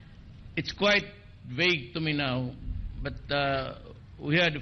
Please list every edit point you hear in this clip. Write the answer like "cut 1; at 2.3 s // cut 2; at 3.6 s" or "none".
none